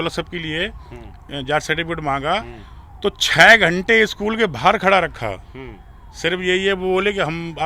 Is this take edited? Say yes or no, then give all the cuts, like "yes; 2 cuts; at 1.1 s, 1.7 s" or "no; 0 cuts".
no; 0 cuts